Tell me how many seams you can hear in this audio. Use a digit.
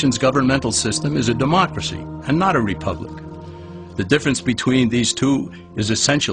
1